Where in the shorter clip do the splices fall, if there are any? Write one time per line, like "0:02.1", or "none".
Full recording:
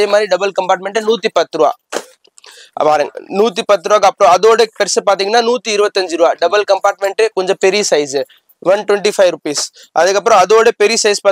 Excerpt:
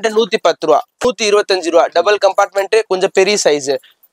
0:01.0